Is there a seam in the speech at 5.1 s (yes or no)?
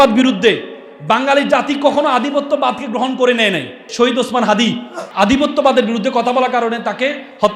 yes